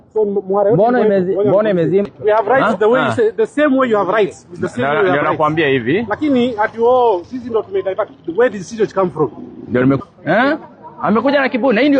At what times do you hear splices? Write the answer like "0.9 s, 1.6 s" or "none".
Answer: 2.1 s, 10.0 s